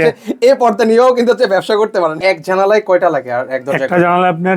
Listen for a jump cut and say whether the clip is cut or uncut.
cut